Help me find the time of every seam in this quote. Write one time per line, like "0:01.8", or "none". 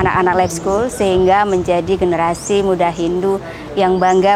none